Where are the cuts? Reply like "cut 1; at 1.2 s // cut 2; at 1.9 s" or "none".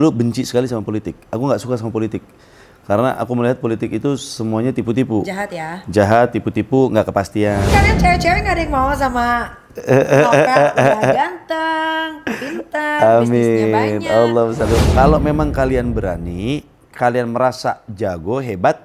cut 1; at 7.7 s // cut 2; at 14.8 s